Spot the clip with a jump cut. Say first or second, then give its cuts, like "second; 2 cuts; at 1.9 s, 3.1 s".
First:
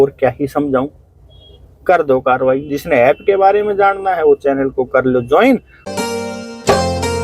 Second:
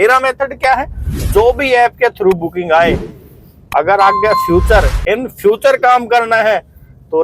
first; 1 cut; at 5.8 s